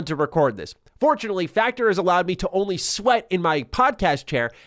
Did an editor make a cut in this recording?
no; 0 cuts

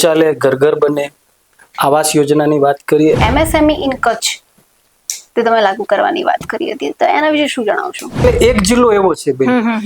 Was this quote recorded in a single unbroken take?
no; 2 cuts; at 3.2 s, 8.2 s

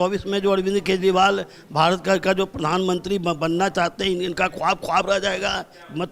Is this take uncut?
yes; 0 cuts

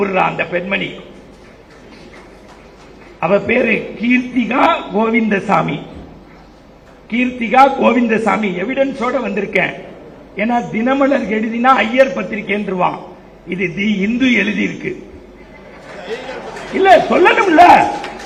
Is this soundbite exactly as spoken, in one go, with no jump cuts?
yes; 0 cuts

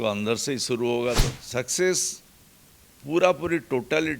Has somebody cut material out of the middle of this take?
yes; 1 cut; at 1.3 s

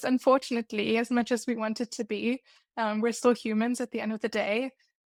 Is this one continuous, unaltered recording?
yes; 0 cuts

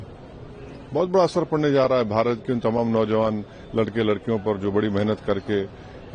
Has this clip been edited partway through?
no; 0 cuts

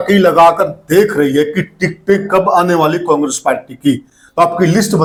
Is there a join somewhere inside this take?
no; 0 cuts

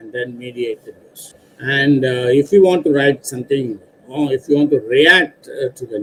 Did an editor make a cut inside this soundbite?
no; 0 cuts

